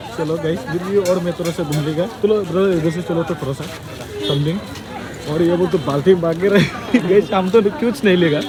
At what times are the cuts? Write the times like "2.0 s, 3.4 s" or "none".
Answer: none

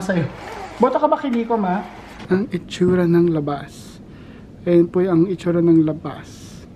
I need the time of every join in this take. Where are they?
2.1 s

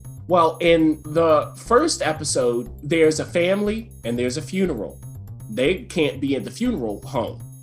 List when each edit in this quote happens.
1.0 s

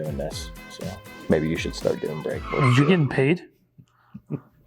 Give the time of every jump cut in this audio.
none

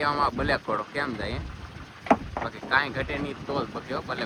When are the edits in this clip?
none

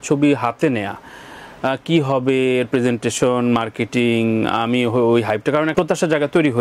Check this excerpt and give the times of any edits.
5.7 s

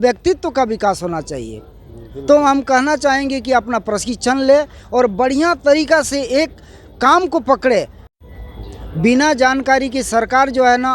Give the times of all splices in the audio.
8.2 s

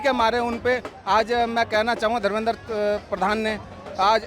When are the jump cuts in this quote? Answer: none

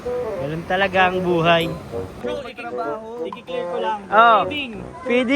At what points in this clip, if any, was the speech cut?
2.1 s

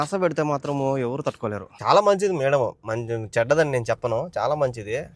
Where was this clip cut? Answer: 1.7 s

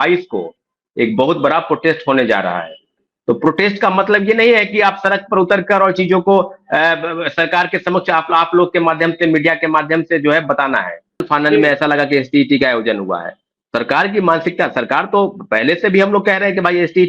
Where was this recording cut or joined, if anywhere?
11.2 s

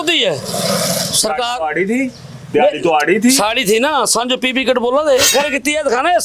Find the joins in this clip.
5.3 s

